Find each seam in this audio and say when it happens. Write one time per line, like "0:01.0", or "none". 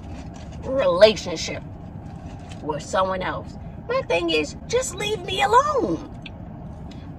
0:03.6